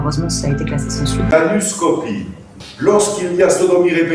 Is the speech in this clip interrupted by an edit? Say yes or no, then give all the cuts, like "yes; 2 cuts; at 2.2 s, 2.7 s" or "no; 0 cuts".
yes; 1 cut; at 1.3 s